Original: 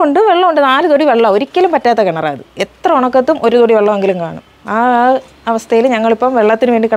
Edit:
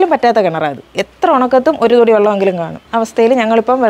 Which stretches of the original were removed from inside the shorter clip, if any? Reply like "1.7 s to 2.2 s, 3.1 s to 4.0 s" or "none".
4.4 s to 5.4 s